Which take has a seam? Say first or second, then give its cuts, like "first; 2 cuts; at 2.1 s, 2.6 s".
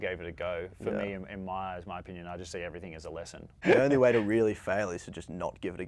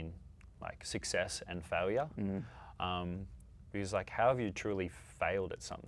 first; 1 cut; at 3.6 s